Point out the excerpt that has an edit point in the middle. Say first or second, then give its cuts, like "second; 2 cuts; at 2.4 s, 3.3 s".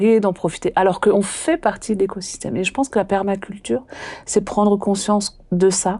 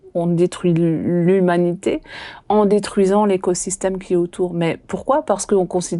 first; 1 cut; at 1.1 s